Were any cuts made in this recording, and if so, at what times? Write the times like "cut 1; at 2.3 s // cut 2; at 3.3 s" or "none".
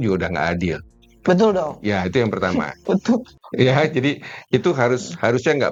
none